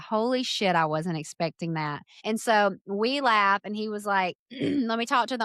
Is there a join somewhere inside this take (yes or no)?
yes